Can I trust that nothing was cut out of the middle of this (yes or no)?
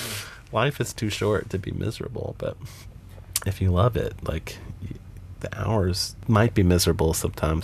no